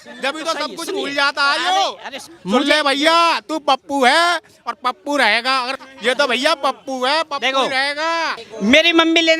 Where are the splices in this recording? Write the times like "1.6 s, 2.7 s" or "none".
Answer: 2.3 s, 5.8 s, 8.4 s